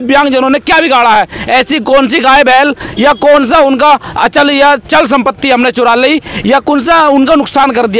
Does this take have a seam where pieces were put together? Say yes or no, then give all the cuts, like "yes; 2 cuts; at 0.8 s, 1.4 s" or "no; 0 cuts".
no; 0 cuts